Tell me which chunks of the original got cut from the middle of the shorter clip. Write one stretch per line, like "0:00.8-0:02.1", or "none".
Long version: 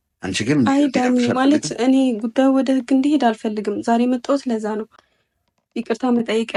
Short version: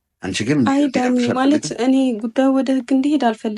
none